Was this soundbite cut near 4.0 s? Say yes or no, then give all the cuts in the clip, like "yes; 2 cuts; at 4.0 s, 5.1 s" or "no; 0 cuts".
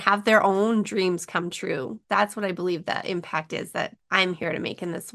yes; 2 cuts; at 2.0 s, 4.0 s